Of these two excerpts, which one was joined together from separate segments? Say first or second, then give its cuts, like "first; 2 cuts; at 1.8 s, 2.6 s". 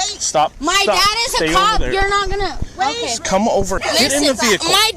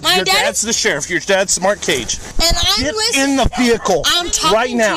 first; 1 cut; at 3.8 s